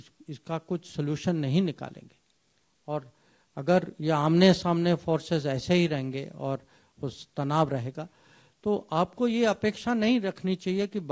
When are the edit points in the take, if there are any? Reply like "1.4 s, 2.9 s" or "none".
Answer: none